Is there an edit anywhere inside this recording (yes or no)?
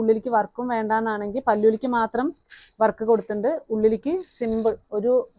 no